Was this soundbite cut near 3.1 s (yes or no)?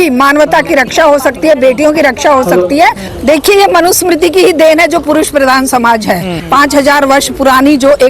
yes